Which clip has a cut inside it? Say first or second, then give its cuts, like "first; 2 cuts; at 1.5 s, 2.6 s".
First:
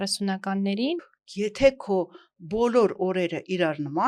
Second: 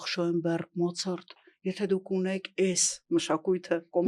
first; 1 cut; at 1.0 s